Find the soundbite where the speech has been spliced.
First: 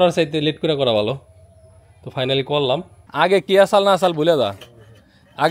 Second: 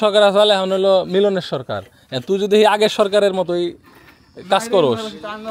first; 1 cut; at 3.0 s

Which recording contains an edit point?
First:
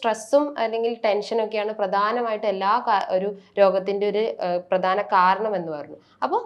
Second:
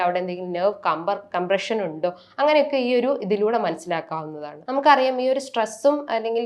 second; 1 cut; at 4.5 s

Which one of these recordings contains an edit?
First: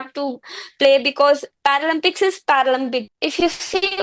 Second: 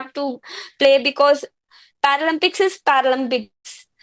first; 2 cuts; at 1.5 s, 3.1 s

